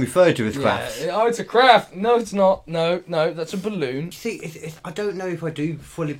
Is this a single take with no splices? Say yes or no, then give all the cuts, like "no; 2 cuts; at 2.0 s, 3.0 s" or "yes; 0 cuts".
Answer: no; 1 cut; at 4.1 s